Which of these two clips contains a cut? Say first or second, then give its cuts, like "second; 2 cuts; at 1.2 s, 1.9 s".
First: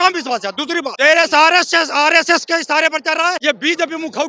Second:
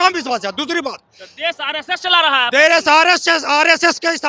first; 2 cuts; at 0.9 s, 3.4 s